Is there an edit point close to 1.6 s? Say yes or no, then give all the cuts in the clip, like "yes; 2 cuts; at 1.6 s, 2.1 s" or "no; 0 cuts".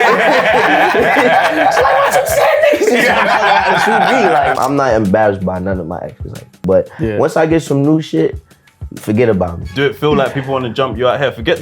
no; 3 cuts; at 4.5 s, 6.5 s, 9.7 s